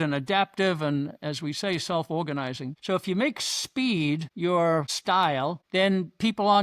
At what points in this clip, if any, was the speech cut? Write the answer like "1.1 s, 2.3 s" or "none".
2.7 s, 4.3 s, 5.2 s